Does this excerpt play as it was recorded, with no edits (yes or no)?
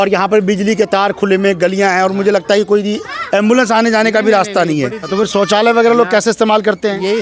no